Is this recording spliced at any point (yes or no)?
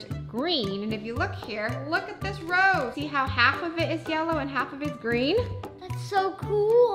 no